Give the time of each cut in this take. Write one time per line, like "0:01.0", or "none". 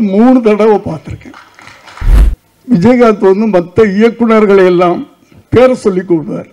0:02.1